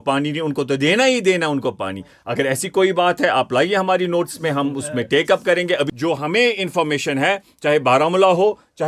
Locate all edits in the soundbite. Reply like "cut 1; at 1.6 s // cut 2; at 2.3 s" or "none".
cut 1; at 5.9 s